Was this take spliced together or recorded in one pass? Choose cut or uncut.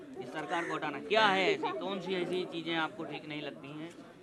uncut